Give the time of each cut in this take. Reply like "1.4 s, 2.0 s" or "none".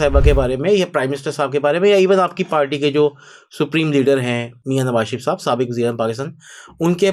4.5 s